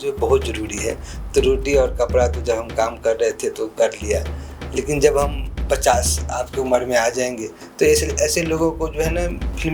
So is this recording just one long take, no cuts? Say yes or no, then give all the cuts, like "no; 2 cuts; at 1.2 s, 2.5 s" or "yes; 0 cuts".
yes; 0 cuts